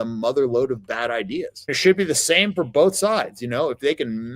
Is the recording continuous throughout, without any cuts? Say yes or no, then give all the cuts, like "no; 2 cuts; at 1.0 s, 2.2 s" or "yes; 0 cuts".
no; 1 cut; at 1.7 s